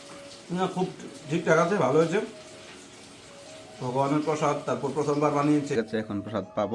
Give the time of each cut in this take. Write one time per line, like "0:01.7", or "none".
0:05.8